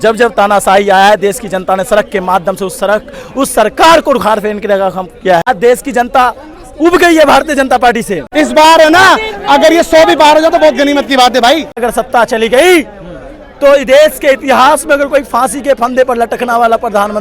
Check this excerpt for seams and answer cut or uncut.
cut